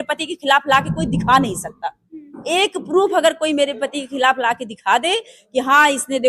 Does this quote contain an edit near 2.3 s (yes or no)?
no